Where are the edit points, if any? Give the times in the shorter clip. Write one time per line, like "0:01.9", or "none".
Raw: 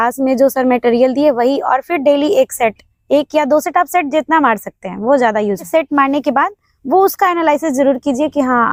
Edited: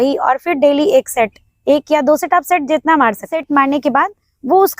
0:03.3